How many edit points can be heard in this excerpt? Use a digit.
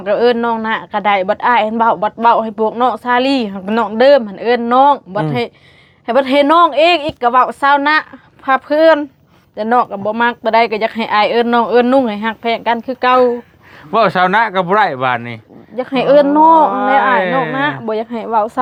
0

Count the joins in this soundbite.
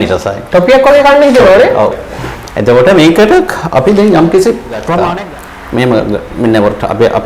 1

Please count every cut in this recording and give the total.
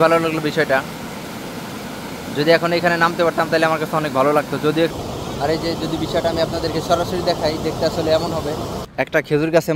2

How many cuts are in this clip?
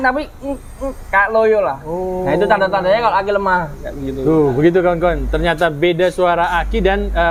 0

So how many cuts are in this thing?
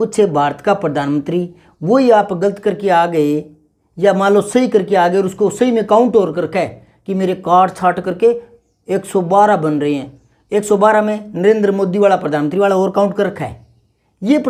0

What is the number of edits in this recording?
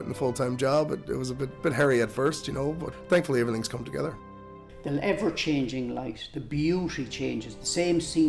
3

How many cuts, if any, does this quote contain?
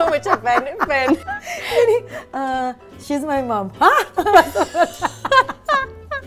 1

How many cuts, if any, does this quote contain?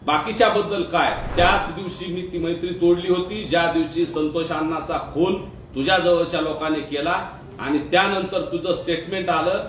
1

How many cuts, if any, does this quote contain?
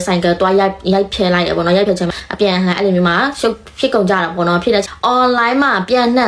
2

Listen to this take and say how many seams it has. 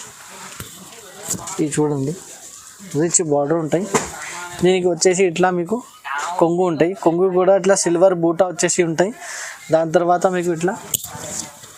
0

